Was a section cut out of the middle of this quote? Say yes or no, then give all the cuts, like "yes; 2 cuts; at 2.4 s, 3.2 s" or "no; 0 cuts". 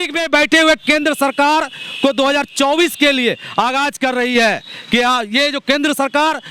no; 0 cuts